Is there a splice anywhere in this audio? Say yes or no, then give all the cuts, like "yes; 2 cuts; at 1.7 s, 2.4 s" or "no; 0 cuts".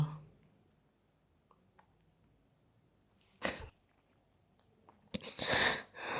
no; 0 cuts